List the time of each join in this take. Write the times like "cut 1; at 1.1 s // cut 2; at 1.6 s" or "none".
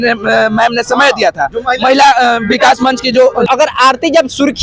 cut 1; at 3.5 s